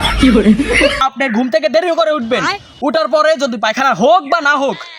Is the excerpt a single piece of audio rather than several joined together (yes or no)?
no